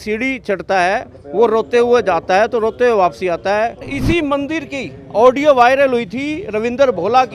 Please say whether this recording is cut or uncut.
cut